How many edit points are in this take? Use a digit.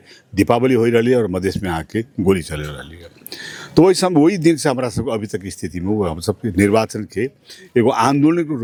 0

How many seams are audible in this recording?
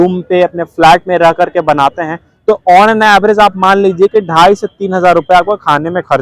0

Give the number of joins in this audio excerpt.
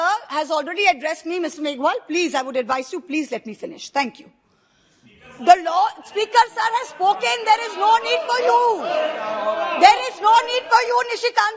0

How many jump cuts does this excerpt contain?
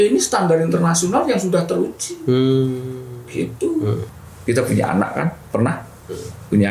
1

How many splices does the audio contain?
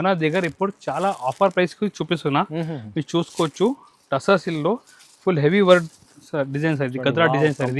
0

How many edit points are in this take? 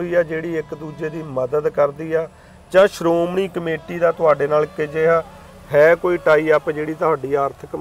0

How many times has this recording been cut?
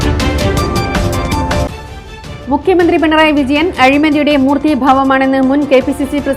1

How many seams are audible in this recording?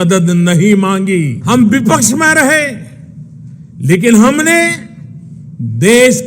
1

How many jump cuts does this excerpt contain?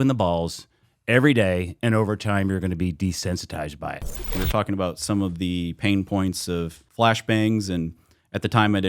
2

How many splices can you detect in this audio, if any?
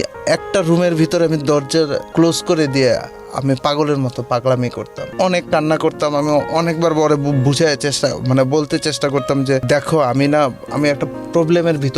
3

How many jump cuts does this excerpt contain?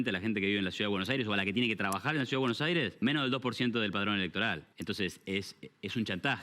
2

